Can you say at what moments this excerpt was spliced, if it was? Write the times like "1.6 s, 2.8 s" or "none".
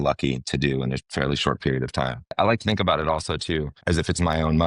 2.3 s, 3.7 s